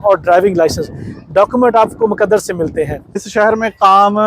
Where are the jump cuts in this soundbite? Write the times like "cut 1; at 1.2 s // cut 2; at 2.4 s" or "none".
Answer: cut 1; at 3.2 s